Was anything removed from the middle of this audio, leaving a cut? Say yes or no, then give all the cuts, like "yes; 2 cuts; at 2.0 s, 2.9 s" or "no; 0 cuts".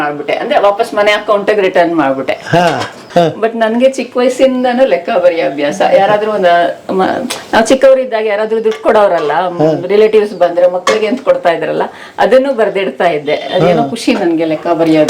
yes; 1 cut; at 3.0 s